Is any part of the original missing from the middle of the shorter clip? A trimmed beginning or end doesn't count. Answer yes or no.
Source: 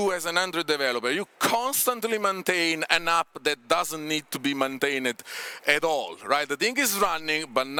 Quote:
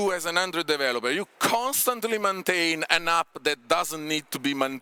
no